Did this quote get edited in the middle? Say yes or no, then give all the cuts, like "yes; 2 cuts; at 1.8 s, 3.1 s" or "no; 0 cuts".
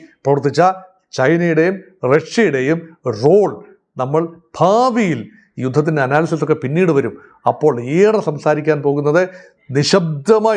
no; 0 cuts